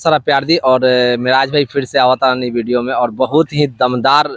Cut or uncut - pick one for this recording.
uncut